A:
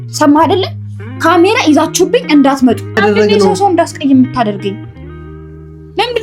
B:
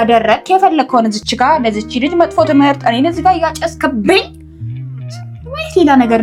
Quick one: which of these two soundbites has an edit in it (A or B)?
A